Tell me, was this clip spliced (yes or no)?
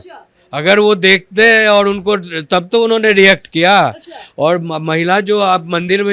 no